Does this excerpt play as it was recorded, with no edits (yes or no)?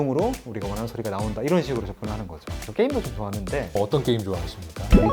no